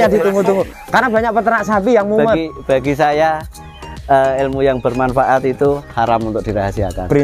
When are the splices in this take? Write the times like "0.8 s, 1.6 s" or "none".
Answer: none

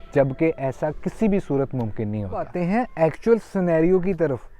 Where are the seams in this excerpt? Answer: 2.5 s

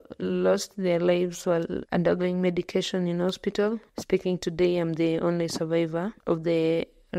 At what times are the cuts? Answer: 3.9 s

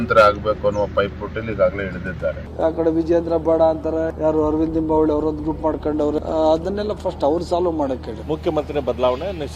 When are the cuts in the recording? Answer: 2.5 s, 4.1 s, 6.2 s, 8.1 s

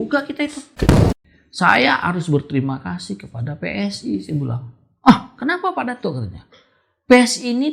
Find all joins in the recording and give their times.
0.9 s

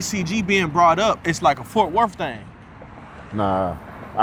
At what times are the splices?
none

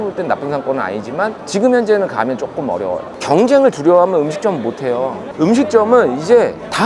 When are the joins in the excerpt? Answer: 3.1 s

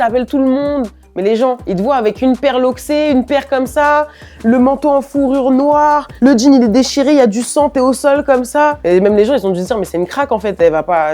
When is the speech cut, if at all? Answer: none

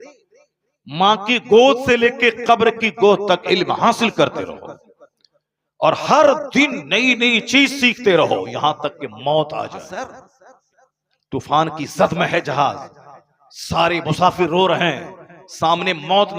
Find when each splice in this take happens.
9.8 s

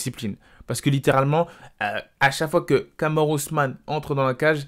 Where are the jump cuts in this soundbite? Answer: none

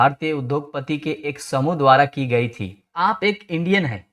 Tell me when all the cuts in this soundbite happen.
2.9 s

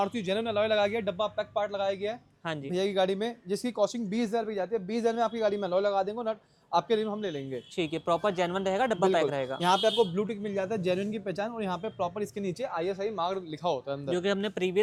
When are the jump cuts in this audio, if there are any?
none

